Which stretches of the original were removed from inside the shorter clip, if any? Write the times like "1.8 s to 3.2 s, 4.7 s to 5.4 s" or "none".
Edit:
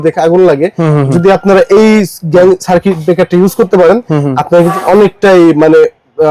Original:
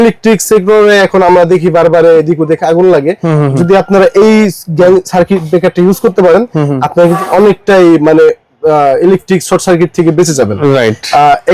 none